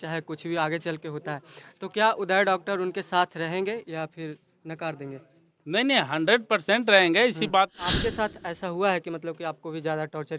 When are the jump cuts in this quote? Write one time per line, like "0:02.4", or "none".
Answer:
0:07.8